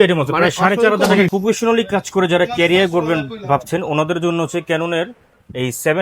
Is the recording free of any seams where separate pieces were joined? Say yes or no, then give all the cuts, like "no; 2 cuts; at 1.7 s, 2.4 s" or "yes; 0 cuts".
no; 1 cut; at 1.3 s